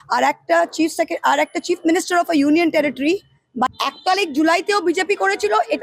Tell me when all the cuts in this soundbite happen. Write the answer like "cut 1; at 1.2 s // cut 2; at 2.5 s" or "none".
cut 1; at 3.7 s